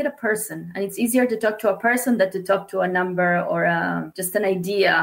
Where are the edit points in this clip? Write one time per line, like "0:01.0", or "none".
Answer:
0:04.1